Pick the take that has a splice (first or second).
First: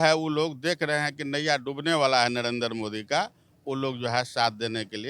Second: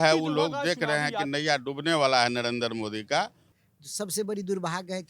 second